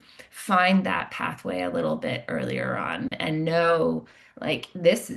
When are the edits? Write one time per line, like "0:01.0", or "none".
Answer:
none